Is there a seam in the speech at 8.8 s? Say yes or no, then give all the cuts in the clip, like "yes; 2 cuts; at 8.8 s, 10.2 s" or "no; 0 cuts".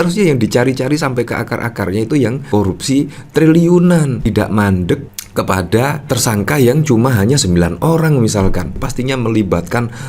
yes; 1 cut; at 8.8 s